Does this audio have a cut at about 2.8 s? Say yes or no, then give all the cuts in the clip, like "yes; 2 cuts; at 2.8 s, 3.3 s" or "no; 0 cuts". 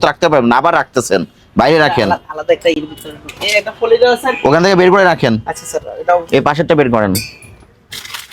no; 0 cuts